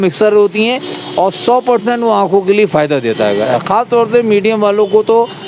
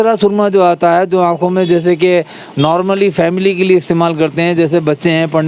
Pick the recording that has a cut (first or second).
first